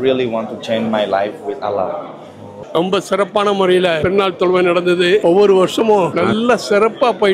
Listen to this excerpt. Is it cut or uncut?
cut